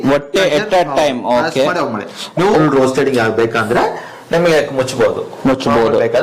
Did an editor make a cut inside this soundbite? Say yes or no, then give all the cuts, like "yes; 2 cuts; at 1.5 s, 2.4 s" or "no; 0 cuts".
yes; 1 cut; at 2.6 s